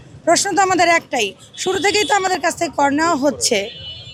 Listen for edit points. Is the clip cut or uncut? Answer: uncut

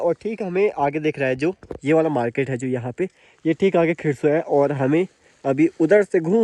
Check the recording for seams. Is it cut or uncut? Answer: uncut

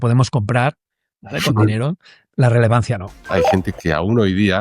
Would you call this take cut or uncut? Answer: cut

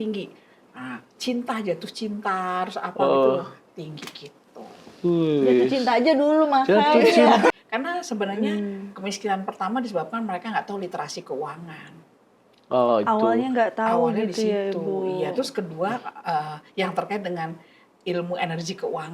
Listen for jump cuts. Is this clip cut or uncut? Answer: cut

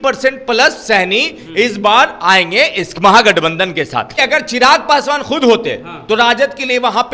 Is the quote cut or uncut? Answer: cut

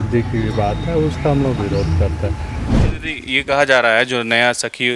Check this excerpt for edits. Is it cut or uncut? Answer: cut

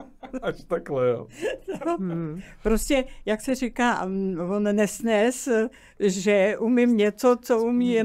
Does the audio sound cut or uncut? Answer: uncut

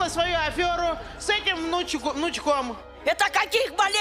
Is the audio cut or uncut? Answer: cut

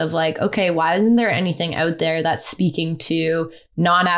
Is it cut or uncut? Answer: uncut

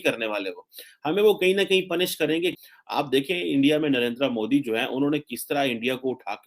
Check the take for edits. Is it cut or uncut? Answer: cut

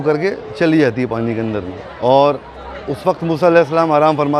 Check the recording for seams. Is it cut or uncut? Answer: uncut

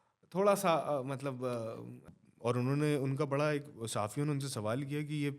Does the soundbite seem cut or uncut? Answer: cut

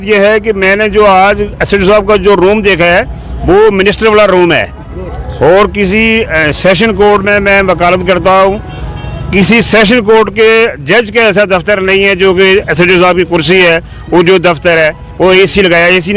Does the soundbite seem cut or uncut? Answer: uncut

